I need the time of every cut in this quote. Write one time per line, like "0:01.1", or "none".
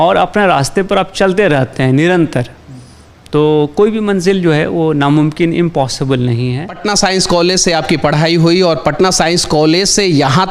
0:06.8